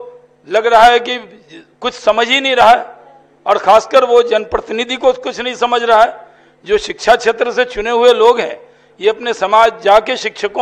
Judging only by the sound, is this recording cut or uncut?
uncut